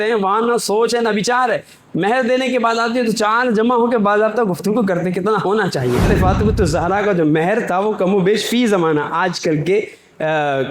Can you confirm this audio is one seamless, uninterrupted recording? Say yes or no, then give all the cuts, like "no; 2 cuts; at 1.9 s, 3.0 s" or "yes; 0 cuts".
no; 1 cut; at 6.1 s